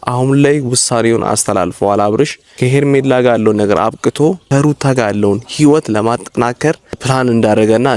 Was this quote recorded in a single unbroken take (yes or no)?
no